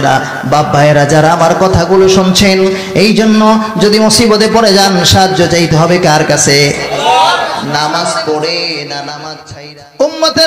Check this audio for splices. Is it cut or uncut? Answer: cut